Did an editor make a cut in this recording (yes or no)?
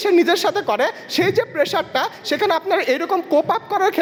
no